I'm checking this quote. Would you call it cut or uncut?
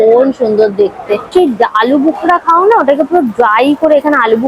cut